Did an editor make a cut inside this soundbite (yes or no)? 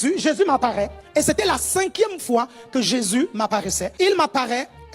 yes